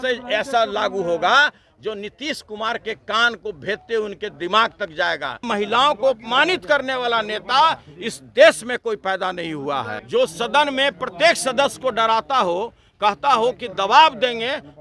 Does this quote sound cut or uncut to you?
cut